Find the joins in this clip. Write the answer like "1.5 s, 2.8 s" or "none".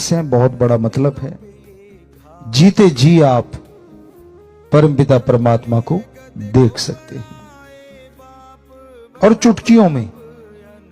7.3 s, 9.2 s